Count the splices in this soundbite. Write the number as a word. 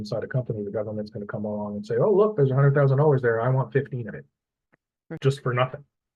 one